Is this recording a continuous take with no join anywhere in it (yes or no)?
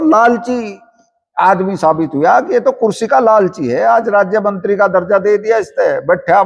yes